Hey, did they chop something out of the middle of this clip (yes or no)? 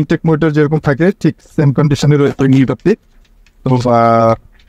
no